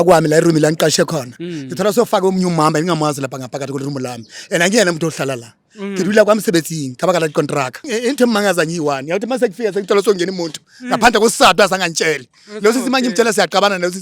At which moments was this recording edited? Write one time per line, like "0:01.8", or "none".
0:07.9